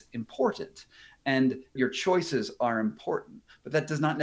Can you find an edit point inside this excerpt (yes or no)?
yes